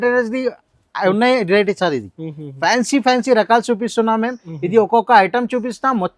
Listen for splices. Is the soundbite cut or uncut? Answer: uncut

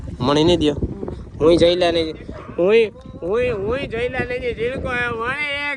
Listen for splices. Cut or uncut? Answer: uncut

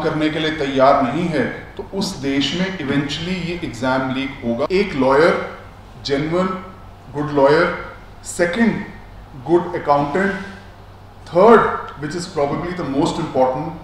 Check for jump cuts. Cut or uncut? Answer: cut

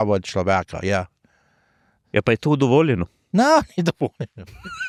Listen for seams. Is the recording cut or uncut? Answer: uncut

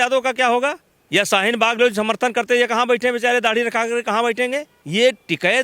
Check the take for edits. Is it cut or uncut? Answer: cut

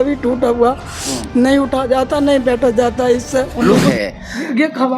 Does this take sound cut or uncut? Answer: cut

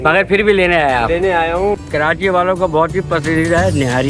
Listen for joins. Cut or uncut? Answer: cut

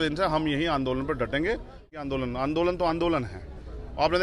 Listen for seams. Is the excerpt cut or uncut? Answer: cut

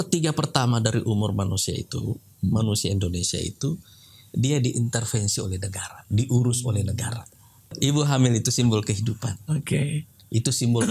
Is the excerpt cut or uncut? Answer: cut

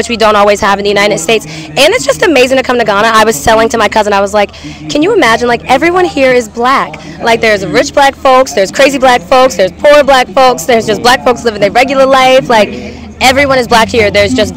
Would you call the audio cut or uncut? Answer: uncut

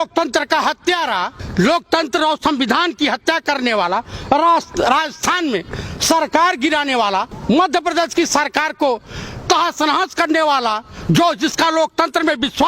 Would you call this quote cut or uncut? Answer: cut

